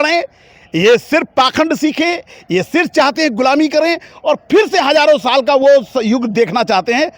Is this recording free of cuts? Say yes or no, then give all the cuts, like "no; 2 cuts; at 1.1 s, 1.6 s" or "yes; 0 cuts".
yes; 0 cuts